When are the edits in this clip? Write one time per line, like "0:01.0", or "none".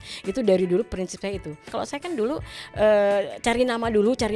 0:01.7